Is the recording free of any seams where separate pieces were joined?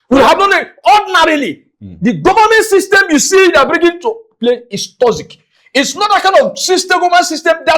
yes; 0 cuts

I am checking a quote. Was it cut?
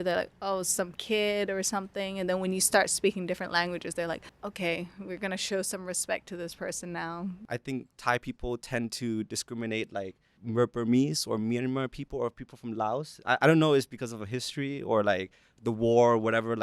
yes; 3 cuts; at 4.4 s, 7.4 s, 10.3 s

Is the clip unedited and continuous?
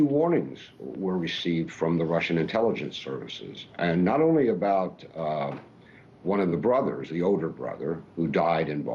yes; 0 cuts

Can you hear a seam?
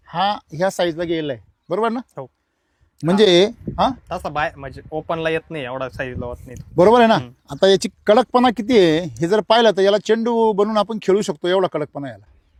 no; 0 cuts

